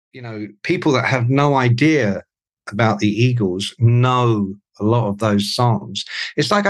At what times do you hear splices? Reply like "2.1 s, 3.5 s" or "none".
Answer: none